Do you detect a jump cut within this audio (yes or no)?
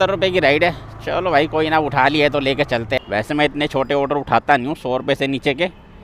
yes